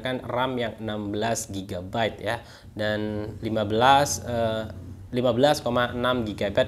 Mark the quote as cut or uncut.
uncut